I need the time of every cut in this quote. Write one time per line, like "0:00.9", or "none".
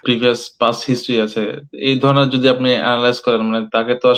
none